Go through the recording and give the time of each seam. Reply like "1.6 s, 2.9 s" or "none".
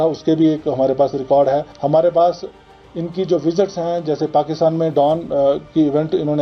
1.7 s